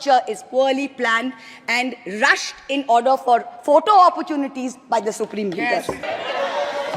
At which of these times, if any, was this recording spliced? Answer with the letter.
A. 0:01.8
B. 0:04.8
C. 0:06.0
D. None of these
C